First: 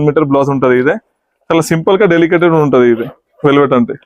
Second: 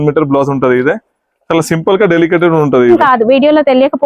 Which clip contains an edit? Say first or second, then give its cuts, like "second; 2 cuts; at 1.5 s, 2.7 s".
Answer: second; 1 cut; at 3.0 s